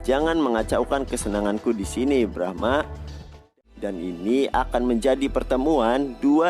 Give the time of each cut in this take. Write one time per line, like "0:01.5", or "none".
0:03.5